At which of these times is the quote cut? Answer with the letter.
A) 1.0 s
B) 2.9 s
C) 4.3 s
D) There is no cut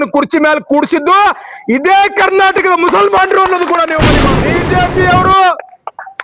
C